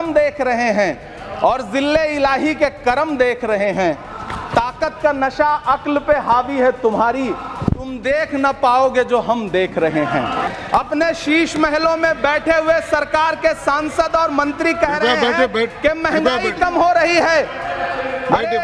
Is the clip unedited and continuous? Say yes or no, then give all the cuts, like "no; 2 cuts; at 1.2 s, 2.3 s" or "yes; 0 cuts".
no; 1 cut; at 10.5 s